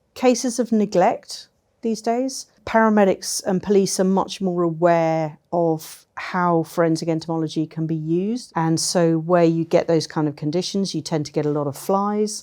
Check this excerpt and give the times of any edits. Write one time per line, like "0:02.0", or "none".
0:02.5
0:08.4

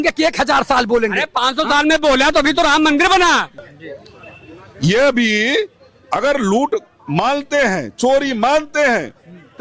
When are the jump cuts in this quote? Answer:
0:03.6

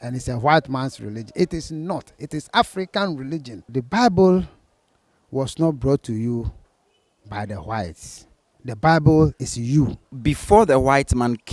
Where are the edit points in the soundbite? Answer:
0:03.7
0:10.2

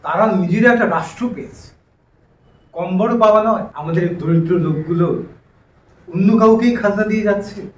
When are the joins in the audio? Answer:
0:03.7

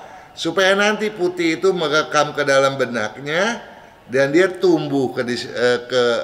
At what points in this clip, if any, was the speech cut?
none

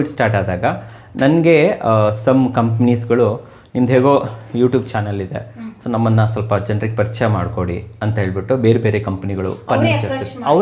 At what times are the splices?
none

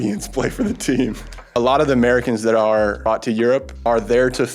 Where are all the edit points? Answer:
0:01.3
0:03.1
0:03.8

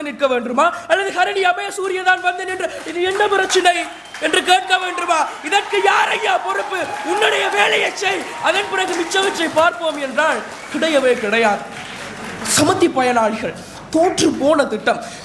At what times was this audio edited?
none

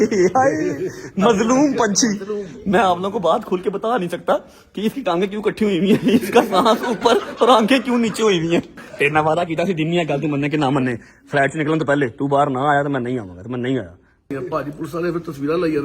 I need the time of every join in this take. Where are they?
0:08.8
0:14.3

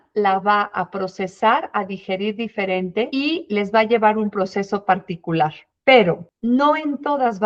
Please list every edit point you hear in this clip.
0:03.1
0:05.7
0:06.3

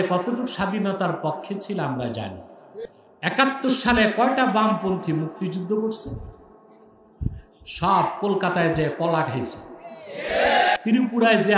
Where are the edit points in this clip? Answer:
0:02.8
0:10.8

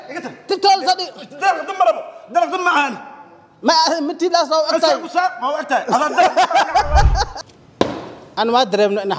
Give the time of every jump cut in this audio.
0:07.4

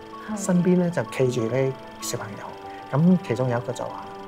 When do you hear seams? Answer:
none

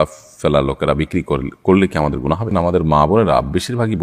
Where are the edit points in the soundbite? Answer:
0:02.5

